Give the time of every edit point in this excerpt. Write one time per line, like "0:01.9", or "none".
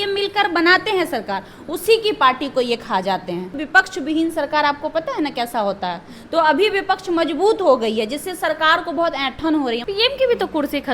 0:03.6
0:09.8